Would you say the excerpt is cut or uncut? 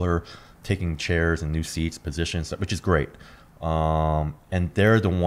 uncut